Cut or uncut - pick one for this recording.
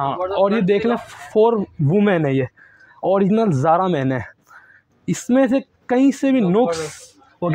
uncut